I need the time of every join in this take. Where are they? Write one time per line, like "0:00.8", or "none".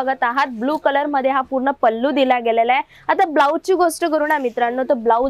none